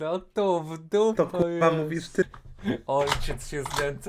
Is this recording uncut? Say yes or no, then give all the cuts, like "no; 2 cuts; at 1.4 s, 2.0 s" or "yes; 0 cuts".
no; 1 cut; at 2.3 s